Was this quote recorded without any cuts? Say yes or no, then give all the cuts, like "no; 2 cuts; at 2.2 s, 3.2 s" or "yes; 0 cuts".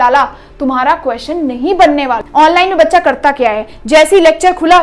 no; 1 cut; at 2.2 s